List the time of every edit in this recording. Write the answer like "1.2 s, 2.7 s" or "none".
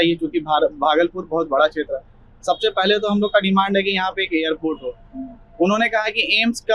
none